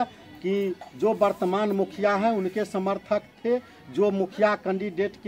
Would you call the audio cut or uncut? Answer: uncut